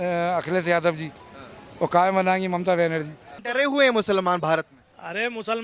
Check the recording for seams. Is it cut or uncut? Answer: cut